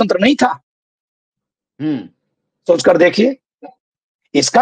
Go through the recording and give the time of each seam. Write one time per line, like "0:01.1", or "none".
none